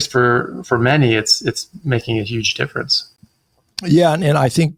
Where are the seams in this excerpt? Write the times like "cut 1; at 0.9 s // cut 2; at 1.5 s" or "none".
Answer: none